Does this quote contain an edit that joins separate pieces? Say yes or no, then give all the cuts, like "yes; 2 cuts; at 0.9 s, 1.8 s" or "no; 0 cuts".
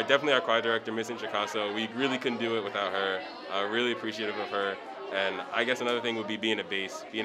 no; 0 cuts